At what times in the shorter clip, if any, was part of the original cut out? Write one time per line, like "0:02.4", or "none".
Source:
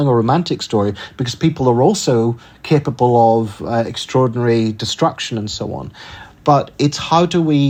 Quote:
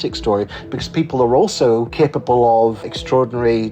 0:01.9
0:02.9